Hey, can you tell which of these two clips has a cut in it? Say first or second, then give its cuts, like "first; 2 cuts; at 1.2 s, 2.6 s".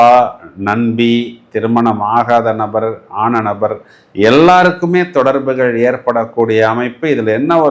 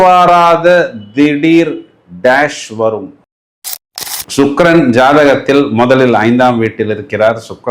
second; 1 cut; at 3.6 s